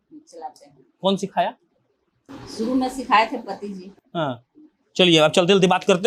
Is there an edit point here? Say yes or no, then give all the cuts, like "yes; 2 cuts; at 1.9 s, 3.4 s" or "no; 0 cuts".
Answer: no; 0 cuts